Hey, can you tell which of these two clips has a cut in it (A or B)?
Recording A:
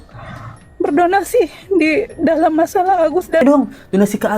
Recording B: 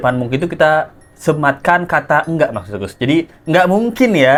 A